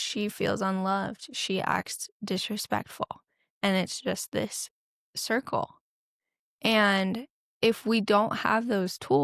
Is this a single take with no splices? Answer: yes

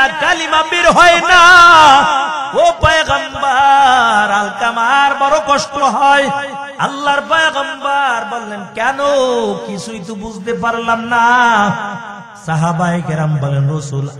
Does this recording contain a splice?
yes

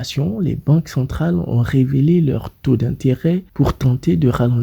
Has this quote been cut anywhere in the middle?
no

